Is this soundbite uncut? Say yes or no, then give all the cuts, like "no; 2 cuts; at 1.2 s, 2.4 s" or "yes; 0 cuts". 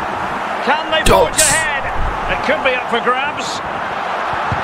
yes; 0 cuts